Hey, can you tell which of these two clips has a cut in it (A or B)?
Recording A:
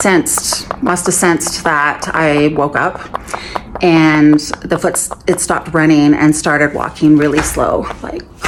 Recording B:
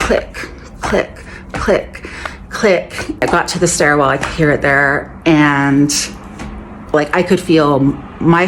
B